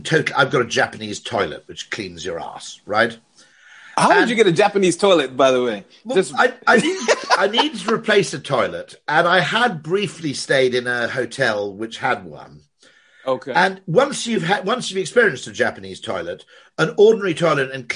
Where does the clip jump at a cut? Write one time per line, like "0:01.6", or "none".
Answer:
none